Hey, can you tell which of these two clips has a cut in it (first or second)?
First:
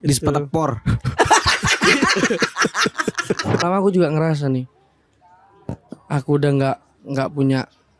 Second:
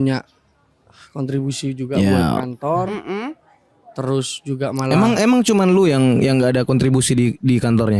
first